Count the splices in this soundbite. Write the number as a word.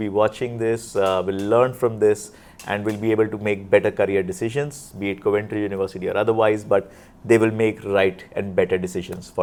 zero